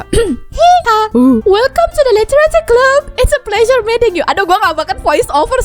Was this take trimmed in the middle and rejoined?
yes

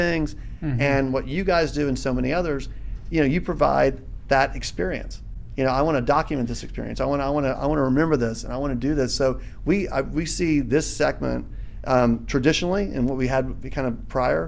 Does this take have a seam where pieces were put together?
no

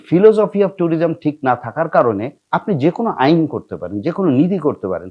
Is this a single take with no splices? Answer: no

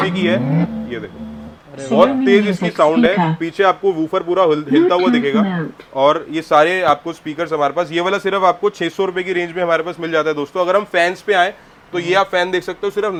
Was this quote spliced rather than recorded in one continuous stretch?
no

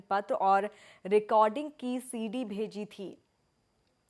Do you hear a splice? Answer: yes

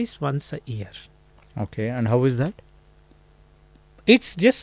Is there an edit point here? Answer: no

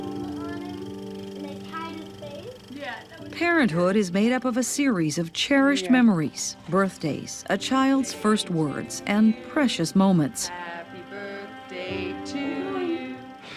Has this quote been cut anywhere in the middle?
no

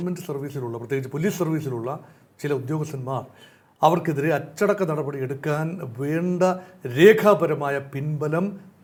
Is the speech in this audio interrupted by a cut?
no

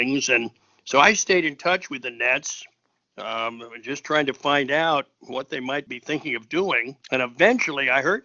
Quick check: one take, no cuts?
no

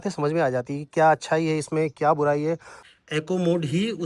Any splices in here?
yes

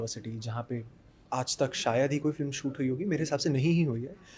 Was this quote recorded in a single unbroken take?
yes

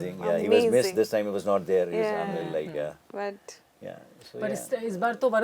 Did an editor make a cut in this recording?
no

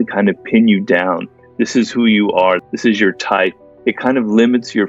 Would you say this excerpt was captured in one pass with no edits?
no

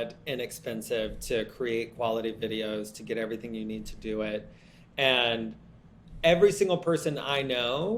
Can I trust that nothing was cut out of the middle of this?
yes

